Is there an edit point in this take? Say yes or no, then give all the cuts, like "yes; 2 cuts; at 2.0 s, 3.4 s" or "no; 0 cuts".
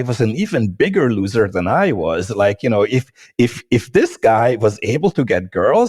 no; 0 cuts